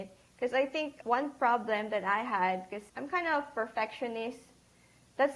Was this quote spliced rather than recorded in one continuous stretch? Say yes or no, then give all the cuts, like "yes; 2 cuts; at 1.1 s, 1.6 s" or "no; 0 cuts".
yes; 2 cuts; at 1.0 s, 2.8 s